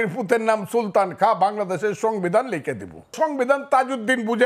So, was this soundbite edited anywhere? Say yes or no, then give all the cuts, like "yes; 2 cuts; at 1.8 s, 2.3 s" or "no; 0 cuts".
yes; 1 cut; at 3.1 s